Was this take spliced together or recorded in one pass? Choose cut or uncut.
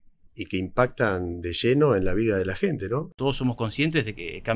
cut